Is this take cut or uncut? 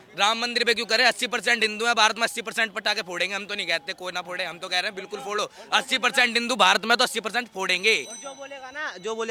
uncut